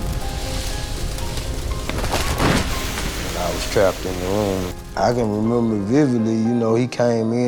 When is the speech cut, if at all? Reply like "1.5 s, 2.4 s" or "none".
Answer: 4.8 s